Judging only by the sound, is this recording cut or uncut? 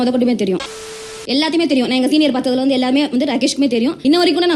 cut